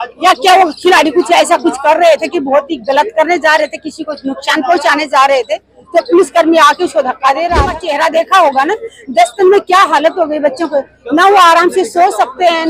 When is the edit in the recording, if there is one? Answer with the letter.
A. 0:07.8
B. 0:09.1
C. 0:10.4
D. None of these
A